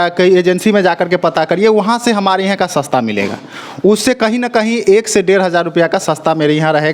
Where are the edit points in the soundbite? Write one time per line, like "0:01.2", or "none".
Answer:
none